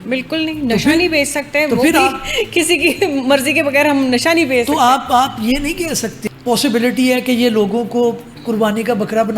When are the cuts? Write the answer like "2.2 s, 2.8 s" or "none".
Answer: 6.1 s